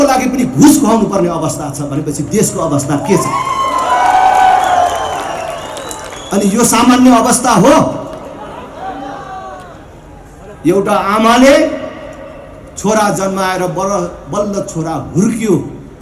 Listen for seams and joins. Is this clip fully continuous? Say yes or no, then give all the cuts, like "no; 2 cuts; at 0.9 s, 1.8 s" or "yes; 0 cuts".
yes; 0 cuts